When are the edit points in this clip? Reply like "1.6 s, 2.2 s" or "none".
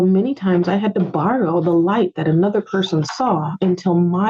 none